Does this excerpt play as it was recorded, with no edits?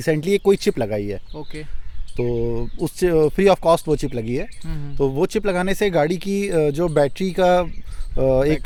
yes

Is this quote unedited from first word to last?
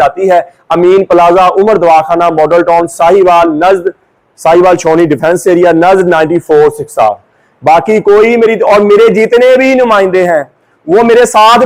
yes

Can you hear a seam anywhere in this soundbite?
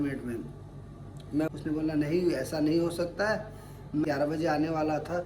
yes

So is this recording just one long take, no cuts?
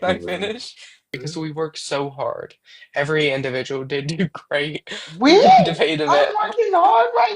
no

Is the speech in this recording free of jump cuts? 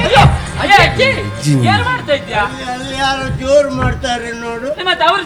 yes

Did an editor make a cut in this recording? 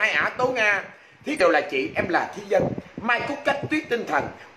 yes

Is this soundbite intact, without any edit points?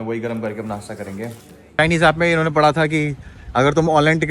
no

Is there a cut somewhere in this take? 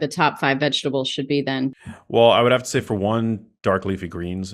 yes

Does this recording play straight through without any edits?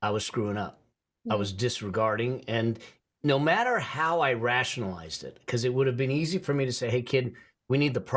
yes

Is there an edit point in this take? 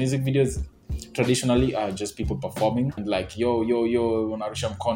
yes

